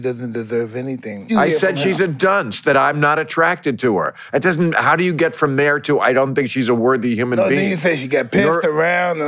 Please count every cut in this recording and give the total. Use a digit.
1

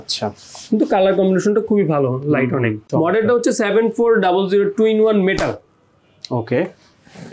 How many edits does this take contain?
1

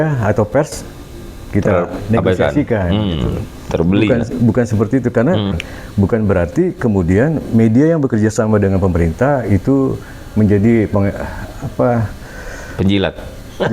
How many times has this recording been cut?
1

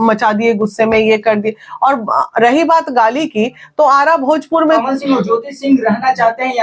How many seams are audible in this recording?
1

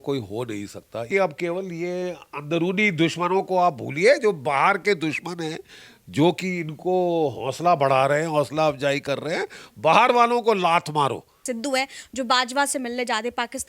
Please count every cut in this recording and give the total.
2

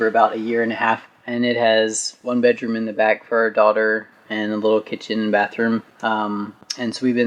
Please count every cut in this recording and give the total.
0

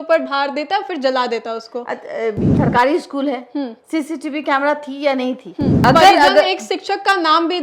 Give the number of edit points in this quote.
2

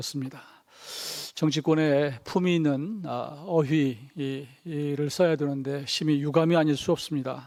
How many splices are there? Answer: 0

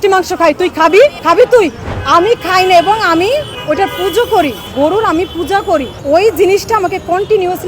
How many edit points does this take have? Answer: 5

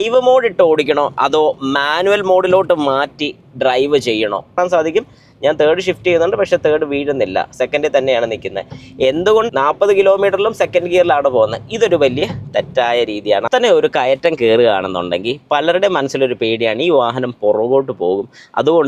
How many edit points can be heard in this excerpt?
3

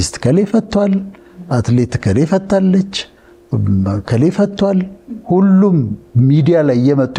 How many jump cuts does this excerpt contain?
0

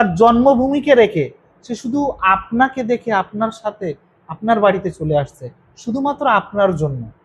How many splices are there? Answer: 0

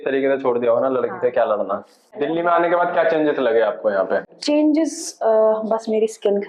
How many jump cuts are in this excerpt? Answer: 1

